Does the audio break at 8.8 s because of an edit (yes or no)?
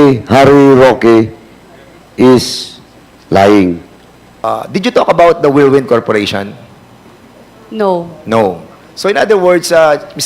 no